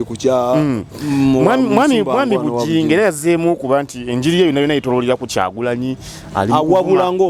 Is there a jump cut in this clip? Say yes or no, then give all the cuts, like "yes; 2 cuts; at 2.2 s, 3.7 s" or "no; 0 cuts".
no; 0 cuts